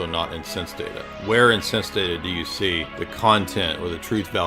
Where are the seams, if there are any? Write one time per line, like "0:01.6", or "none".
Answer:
0:03.0